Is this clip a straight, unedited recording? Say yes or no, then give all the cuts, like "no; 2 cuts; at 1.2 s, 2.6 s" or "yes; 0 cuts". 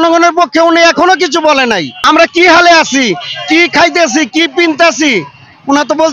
no; 1 cut; at 1.9 s